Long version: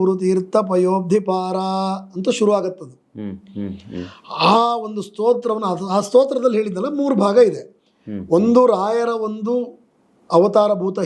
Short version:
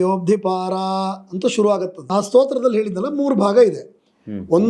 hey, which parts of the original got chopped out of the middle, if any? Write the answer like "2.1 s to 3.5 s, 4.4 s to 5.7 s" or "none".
2.9 s to 5.8 s